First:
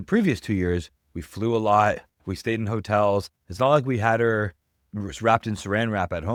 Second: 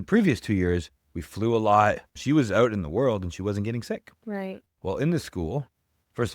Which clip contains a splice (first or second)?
second